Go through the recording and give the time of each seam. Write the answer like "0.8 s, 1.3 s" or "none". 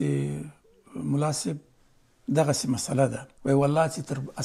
3.3 s

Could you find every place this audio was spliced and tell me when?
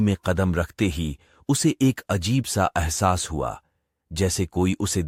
none

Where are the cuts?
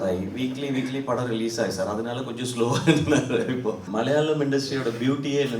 3.8 s

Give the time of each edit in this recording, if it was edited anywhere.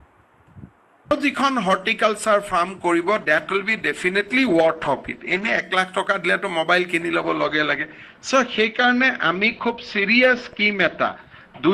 1.1 s

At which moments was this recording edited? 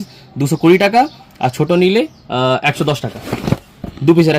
3.3 s

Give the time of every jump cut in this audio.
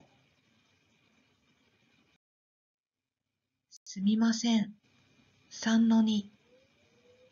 none

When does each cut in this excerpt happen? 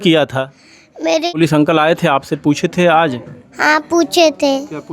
1.3 s

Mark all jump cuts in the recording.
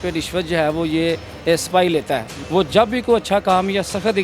2.3 s

